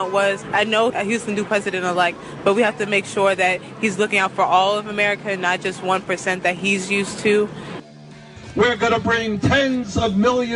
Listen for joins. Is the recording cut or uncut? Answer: cut